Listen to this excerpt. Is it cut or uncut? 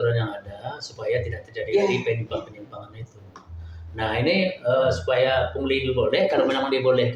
uncut